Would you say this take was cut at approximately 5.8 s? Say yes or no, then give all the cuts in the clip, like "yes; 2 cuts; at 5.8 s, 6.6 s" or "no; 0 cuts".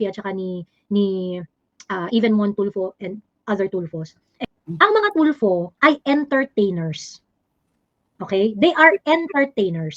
no; 1 cut; at 4.3 s